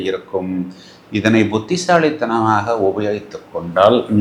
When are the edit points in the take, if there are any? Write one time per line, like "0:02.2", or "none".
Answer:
none